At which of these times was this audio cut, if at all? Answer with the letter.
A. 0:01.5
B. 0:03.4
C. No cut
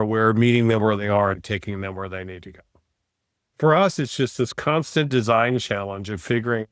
B